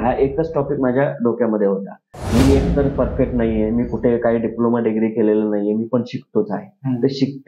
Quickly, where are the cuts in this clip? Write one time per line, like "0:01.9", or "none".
0:02.3